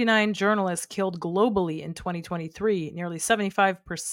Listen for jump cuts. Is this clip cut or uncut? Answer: uncut